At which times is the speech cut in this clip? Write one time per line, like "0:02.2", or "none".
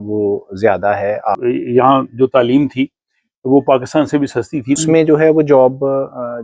0:01.4
0:04.8